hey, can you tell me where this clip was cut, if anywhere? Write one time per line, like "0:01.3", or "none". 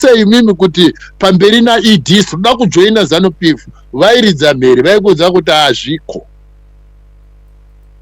none